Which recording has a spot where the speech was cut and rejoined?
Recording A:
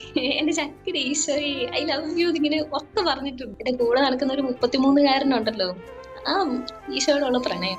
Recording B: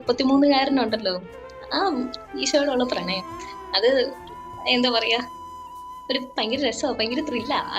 A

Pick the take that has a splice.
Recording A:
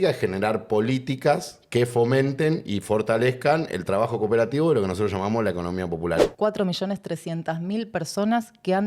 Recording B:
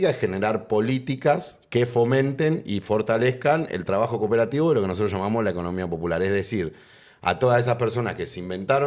A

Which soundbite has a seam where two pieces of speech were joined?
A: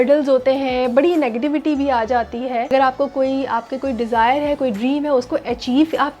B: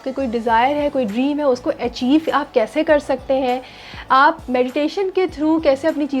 A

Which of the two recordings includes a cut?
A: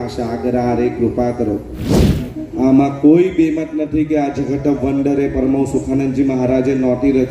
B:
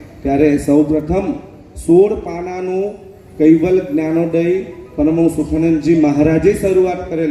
A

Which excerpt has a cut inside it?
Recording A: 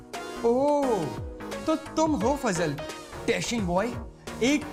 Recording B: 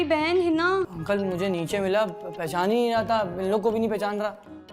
B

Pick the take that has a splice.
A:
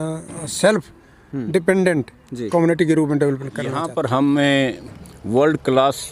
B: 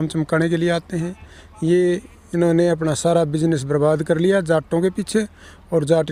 A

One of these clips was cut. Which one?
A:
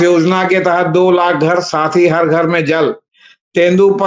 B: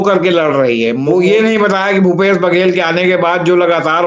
B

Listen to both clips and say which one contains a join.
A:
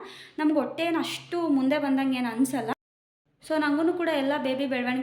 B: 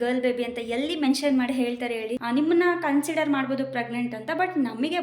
B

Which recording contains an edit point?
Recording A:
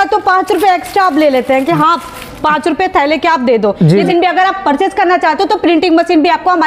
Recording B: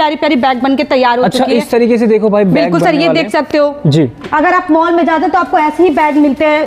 A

